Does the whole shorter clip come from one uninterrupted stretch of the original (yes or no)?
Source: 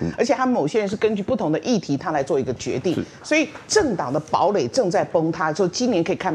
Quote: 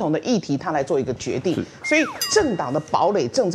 yes